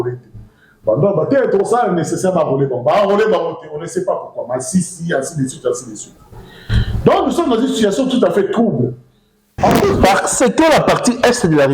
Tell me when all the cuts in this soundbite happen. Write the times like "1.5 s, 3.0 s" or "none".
9.9 s